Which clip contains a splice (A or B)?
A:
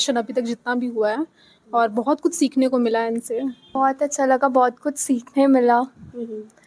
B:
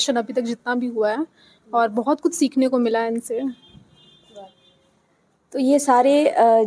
A